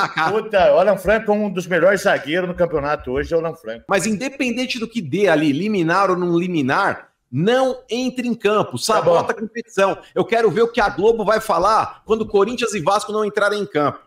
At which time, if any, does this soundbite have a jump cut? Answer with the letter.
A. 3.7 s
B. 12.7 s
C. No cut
A